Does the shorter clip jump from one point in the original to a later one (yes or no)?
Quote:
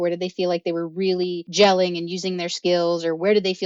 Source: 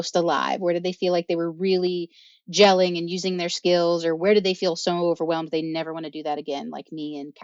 yes